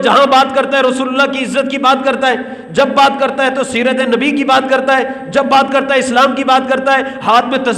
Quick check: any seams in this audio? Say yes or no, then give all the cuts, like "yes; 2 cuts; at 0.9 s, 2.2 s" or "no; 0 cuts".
no; 0 cuts